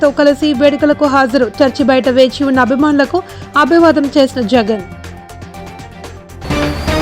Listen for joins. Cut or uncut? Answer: cut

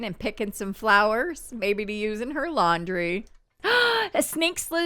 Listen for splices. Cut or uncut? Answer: cut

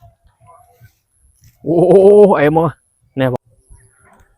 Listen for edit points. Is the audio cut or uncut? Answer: cut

